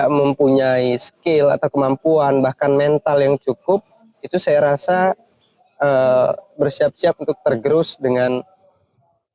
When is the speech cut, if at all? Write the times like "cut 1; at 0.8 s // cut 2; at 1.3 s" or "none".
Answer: none